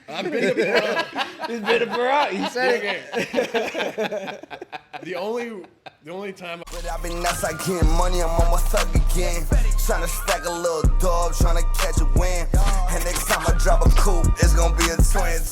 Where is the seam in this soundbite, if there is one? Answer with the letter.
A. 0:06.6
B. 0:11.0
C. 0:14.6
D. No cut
A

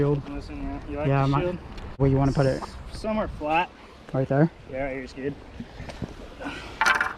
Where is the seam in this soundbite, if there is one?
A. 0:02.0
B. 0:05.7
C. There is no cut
A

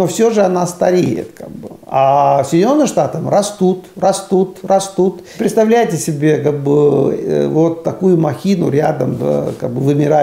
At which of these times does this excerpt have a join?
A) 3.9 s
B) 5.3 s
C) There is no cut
B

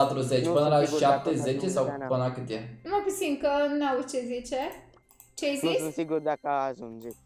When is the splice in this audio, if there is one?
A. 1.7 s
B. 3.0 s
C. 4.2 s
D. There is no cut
D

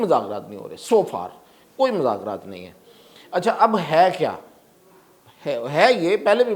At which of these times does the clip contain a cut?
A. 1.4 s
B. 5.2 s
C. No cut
C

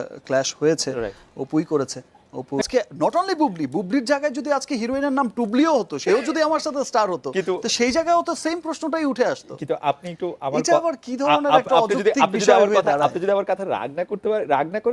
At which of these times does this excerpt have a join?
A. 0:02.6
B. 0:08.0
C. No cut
A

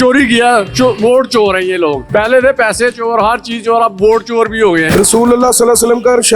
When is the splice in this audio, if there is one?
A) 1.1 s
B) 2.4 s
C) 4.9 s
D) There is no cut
C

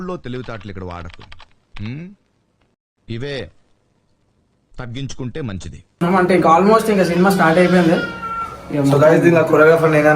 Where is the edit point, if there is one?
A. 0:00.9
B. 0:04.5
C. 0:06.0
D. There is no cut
C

